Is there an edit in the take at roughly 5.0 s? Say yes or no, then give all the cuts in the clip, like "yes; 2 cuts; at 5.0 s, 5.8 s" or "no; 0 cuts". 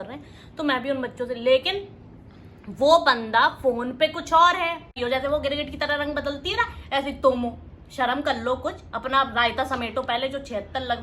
yes; 1 cut; at 5.0 s